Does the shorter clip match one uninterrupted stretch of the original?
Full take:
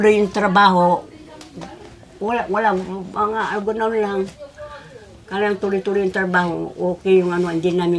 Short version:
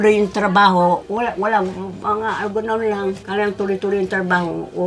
no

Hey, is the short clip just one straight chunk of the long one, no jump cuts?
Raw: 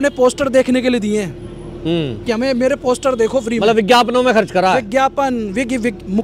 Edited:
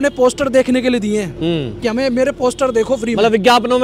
no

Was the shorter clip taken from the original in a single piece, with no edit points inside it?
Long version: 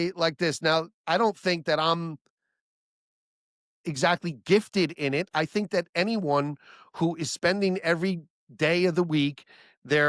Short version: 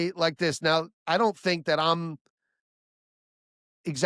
yes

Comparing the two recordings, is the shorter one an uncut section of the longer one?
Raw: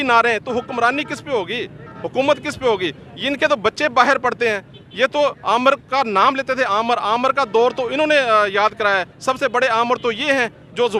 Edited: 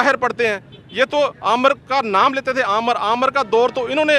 yes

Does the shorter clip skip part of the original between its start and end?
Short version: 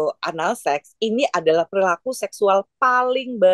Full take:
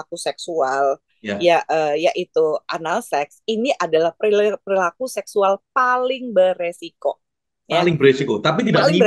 yes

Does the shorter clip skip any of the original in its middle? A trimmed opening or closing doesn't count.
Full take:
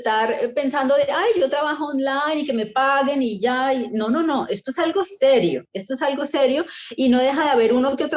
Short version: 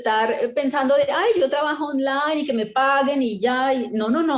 no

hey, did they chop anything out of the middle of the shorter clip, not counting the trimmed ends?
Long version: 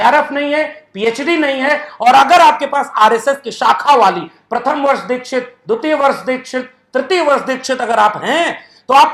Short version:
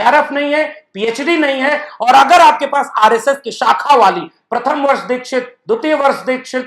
no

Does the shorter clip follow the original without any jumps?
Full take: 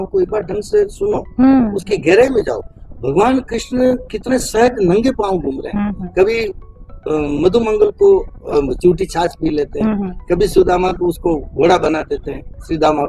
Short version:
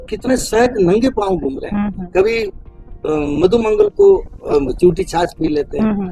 yes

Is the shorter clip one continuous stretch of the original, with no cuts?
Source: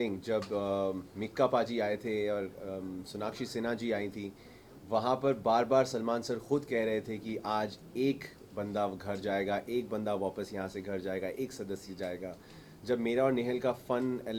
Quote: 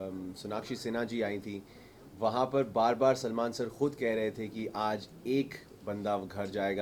yes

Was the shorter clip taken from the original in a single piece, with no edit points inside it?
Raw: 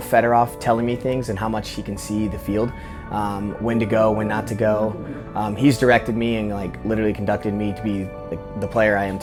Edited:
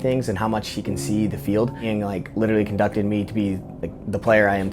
no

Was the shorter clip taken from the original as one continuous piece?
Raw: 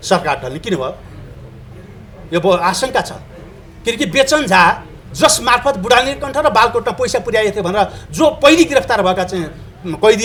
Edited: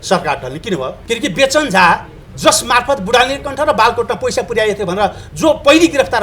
no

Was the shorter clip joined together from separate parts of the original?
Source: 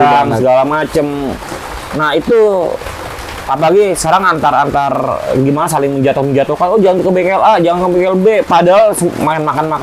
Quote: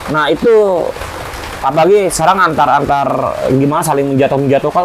no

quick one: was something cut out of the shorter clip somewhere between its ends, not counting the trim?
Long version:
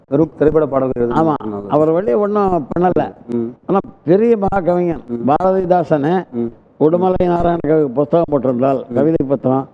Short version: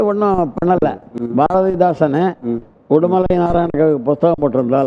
yes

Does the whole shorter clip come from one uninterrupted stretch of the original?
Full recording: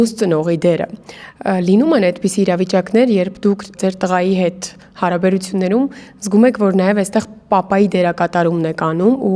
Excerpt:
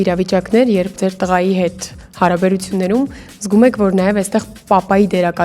no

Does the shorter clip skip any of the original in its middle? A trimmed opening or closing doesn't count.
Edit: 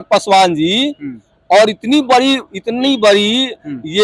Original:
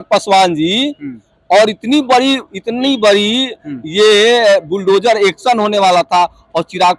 no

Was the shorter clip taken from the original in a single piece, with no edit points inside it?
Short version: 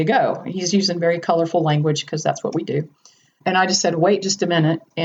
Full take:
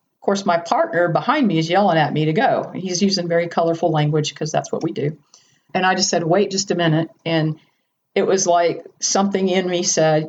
yes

